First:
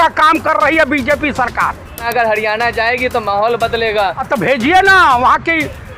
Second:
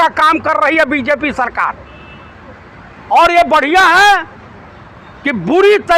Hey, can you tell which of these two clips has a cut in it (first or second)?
first